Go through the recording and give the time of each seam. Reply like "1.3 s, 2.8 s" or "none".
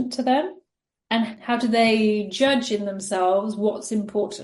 1.3 s

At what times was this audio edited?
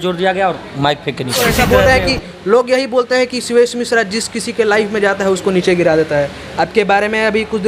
1.4 s

